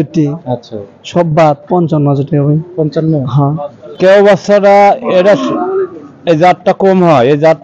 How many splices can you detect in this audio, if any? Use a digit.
1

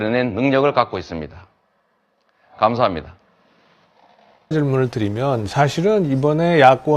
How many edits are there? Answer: 1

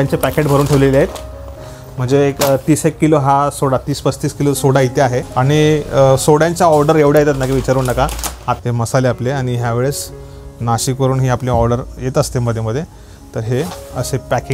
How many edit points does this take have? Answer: 3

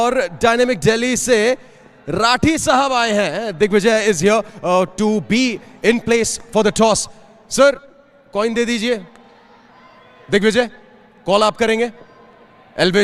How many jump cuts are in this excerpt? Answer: 0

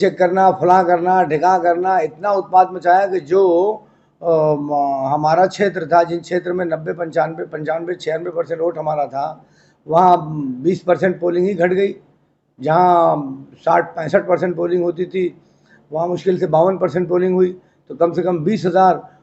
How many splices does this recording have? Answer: 0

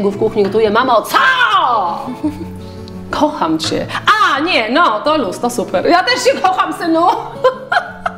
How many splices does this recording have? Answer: 0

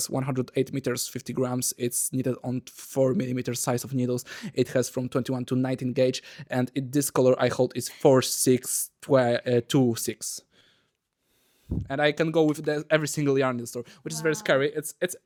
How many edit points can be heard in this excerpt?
0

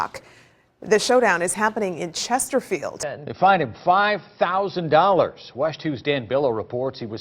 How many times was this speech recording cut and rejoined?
1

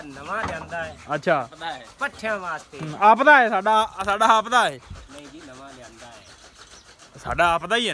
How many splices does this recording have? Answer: 0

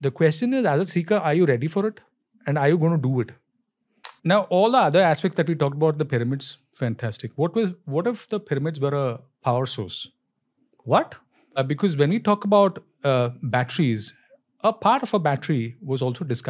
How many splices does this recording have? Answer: 2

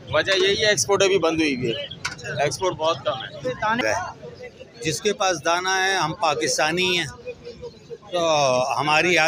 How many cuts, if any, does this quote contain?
1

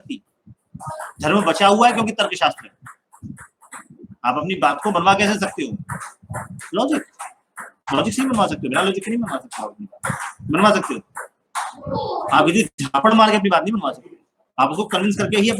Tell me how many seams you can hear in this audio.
0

